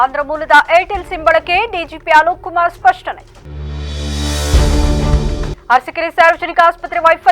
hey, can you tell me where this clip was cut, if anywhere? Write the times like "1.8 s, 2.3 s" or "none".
none